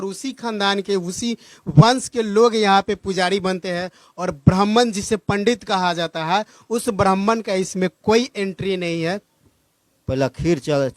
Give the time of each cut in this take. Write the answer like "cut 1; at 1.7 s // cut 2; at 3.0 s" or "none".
cut 1; at 9.4 s

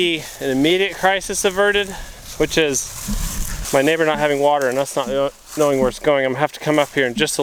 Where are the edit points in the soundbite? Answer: none

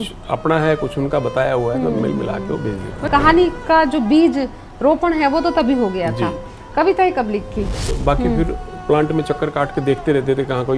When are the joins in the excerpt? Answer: cut 1; at 3.0 s // cut 2; at 7.9 s

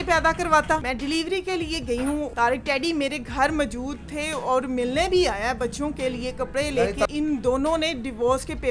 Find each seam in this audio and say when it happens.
cut 1; at 0.9 s // cut 2; at 2.3 s // cut 3; at 7.1 s

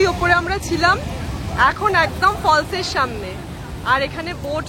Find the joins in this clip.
none

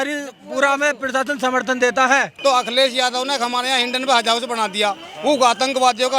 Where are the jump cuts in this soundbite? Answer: cut 1; at 2.3 s

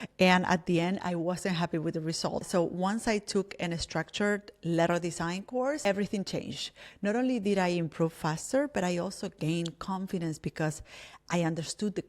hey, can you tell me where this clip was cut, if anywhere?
cut 1; at 2.4 s // cut 2; at 5.8 s

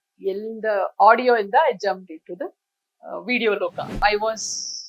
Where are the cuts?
cut 1; at 4.0 s

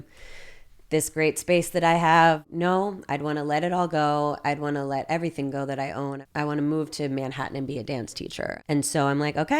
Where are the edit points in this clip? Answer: cut 1; at 2.4 s // cut 2; at 8.6 s

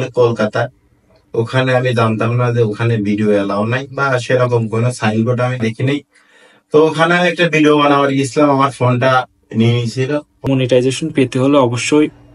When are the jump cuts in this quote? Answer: cut 1; at 10.5 s

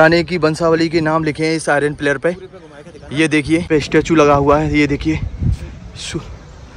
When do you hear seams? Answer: cut 1; at 3.7 s

